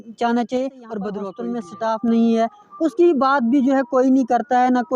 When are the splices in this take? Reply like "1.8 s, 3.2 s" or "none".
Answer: 1.4 s